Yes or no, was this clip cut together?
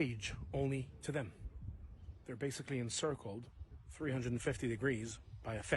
no